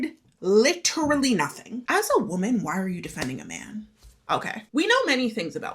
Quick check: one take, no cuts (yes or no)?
no